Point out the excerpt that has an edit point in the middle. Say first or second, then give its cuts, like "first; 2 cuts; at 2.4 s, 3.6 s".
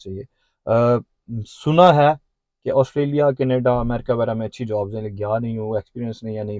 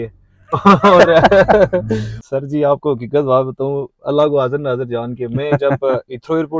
second; 1 cut; at 2.2 s